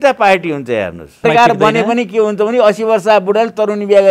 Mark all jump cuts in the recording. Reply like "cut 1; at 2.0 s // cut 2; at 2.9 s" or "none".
cut 1; at 1.2 s